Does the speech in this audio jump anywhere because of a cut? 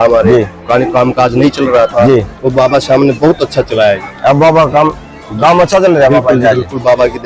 no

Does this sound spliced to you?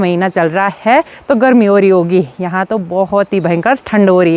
no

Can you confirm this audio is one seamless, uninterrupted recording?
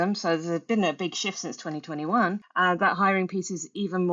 no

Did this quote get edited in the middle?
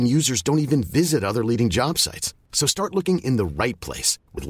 no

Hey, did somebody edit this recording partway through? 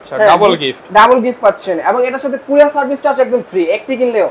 no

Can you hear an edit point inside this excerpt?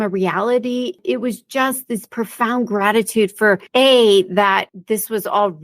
yes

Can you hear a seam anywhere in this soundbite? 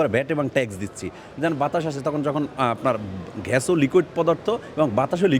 no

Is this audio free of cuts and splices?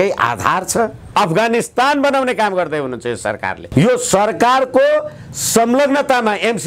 no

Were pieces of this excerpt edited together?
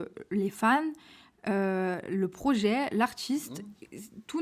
no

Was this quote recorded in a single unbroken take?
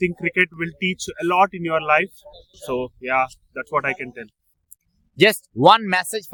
yes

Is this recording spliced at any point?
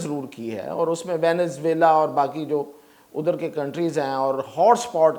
no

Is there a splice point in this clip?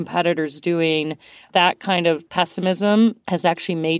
yes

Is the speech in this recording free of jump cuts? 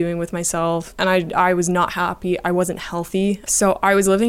no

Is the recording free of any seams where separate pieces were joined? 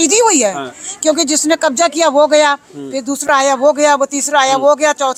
yes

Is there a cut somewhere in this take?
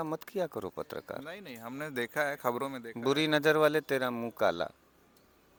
no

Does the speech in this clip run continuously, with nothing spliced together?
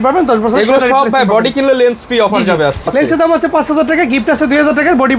no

